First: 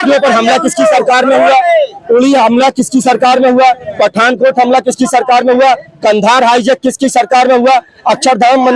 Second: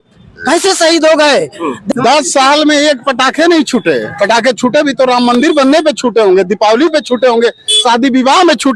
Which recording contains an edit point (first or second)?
second